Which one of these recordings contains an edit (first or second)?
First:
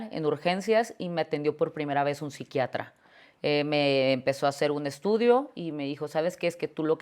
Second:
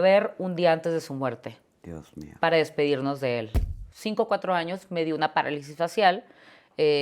second